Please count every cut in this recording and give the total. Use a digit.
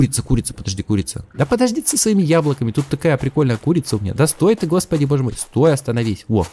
1